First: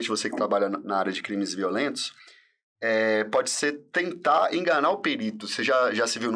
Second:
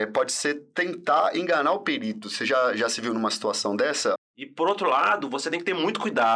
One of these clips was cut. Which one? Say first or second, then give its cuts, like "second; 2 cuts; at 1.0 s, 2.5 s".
second; 1 cut; at 4.2 s